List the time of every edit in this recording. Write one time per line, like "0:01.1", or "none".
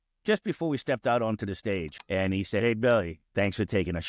0:01.9
0:03.2

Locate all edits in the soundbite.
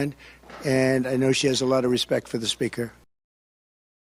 none

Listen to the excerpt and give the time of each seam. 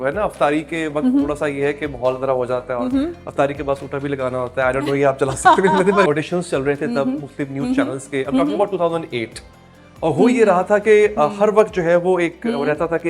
0:06.1

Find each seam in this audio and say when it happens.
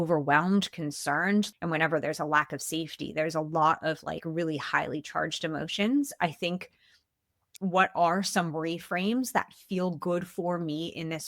0:01.5
0:07.5

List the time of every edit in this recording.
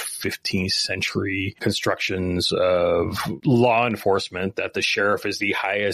0:01.5
0:03.3

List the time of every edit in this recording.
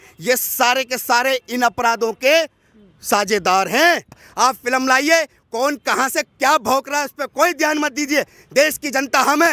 0:04.3

